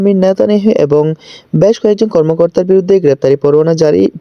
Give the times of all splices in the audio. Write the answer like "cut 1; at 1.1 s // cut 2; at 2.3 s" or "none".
none